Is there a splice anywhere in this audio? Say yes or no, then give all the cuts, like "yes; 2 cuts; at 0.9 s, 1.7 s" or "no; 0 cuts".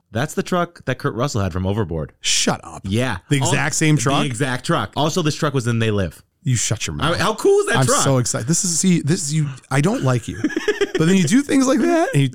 no; 0 cuts